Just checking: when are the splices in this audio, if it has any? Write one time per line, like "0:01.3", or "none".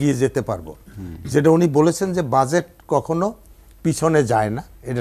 none